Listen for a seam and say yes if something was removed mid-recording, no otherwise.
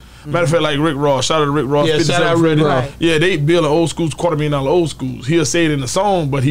no